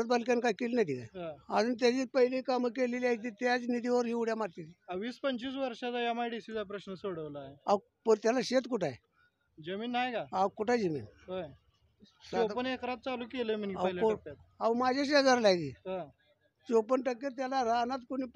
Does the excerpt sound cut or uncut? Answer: uncut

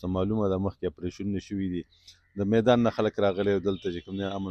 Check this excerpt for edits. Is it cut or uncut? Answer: uncut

